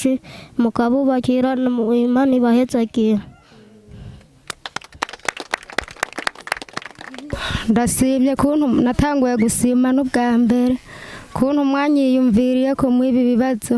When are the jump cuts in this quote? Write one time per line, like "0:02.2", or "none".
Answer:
0:07.3